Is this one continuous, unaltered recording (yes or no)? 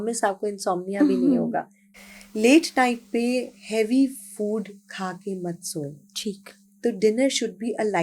no